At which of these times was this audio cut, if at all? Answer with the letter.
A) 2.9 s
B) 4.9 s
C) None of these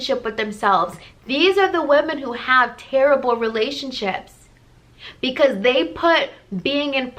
C